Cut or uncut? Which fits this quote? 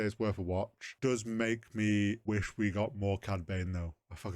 cut